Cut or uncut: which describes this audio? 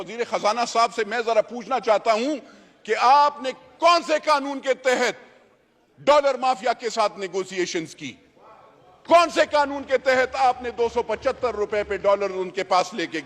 uncut